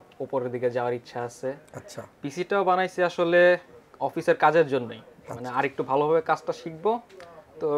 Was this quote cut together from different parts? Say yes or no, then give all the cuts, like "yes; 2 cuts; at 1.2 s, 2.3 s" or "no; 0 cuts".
no; 0 cuts